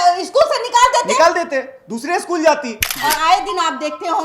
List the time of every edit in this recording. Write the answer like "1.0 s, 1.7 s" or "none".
2.9 s